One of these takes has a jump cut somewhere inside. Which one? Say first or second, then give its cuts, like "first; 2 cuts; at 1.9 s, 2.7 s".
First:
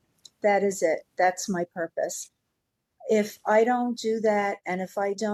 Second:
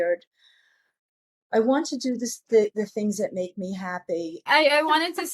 second; 1 cut; at 4.4 s